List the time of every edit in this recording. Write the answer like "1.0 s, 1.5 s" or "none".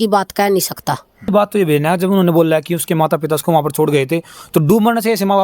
1.3 s

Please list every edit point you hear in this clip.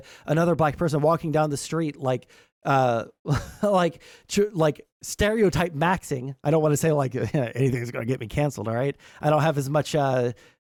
none

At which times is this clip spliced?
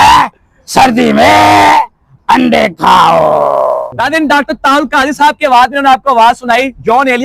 3.9 s

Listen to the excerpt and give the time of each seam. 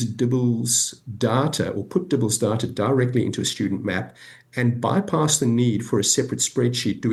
none

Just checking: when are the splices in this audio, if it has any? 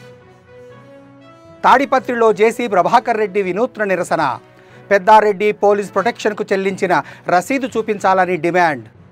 none

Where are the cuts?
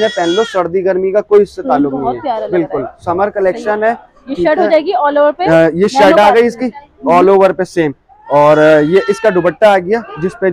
none

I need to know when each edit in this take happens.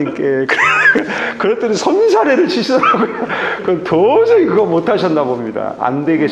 none

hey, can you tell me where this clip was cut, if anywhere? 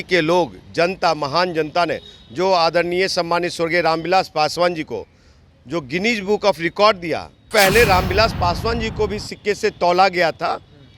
7.5 s

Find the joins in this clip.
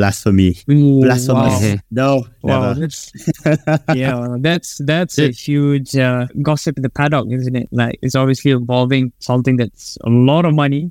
none

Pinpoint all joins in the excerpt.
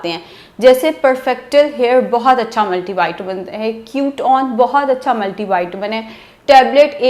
none

